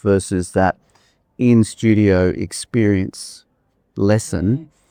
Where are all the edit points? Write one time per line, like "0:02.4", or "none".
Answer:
none